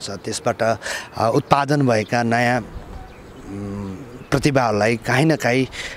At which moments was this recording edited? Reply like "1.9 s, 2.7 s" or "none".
none